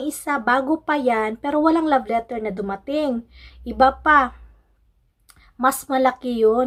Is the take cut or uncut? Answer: uncut